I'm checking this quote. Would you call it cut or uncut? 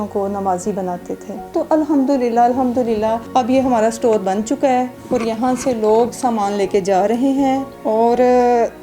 cut